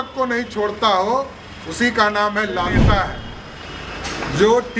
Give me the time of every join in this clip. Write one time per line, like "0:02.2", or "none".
0:02.8